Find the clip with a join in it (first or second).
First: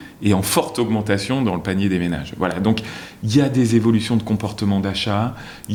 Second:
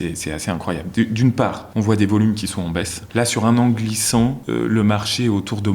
second